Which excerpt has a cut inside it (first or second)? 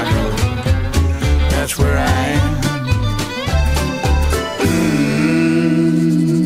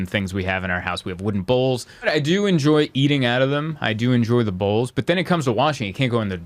second